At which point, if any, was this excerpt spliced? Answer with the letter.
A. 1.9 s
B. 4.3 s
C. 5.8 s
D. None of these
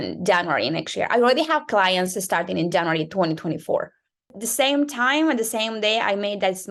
B